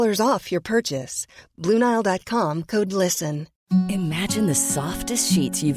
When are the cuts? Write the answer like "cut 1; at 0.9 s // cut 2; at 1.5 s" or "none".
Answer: cut 1; at 3.5 s